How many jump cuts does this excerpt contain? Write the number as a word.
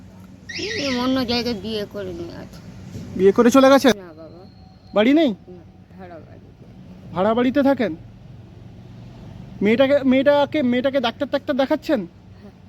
one